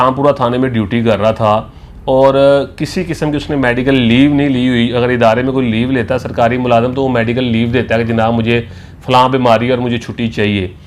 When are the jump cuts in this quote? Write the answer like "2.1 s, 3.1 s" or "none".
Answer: none